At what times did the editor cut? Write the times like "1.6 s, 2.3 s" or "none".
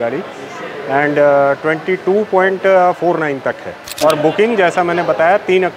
3.9 s